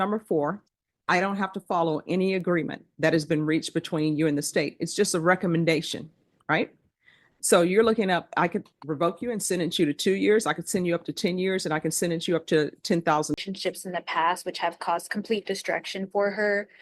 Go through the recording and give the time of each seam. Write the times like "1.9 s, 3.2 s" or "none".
13.4 s